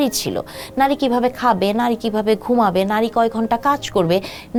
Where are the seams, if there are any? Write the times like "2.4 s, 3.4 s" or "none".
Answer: none